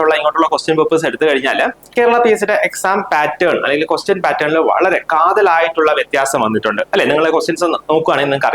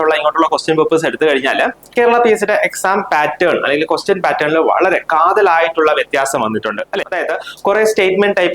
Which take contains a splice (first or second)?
second